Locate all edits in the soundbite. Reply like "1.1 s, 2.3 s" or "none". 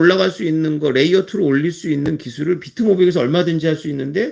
none